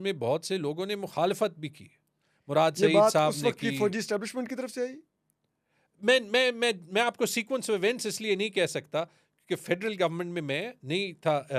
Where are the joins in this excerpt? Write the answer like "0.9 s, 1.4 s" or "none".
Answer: none